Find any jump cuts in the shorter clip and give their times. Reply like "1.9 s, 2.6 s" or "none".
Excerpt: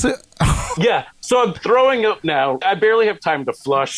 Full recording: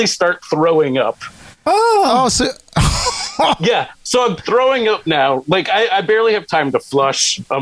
0.8 s, 2.6 s